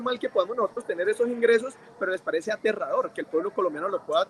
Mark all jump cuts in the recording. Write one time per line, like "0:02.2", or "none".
none

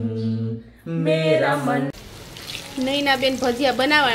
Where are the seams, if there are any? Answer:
0:01.9

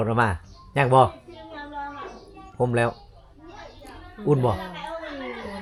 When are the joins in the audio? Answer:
none

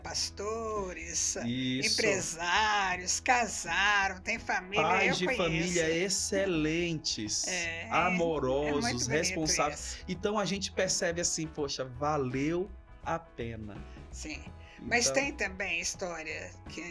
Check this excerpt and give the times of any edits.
none

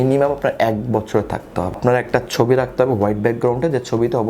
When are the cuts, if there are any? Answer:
0:01.8

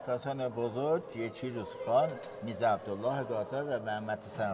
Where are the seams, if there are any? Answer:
none

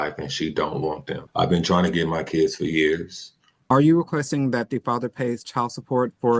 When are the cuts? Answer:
0:01.2
0:03.6

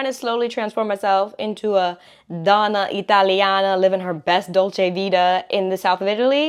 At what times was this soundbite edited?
none

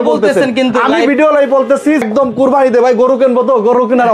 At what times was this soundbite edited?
0:02.0

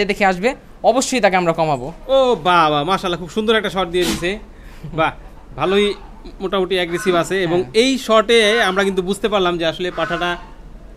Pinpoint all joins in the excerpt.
none

